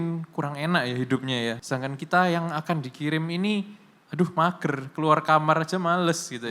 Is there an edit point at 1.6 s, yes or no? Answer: yes